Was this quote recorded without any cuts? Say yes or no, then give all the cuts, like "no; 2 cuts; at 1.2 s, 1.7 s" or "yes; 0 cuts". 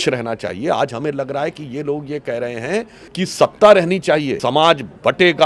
no; 2 cuts; at 3.0 s, 4.3 s